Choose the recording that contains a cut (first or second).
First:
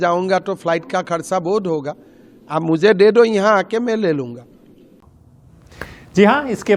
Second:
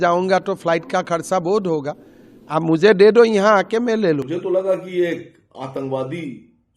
second